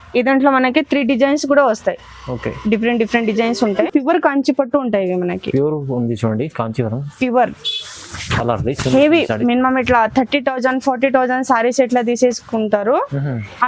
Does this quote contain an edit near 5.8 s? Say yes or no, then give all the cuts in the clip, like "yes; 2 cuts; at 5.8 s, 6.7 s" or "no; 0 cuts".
no; 1 cut; at 3.9 s